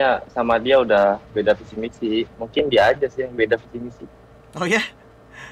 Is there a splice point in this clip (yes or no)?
no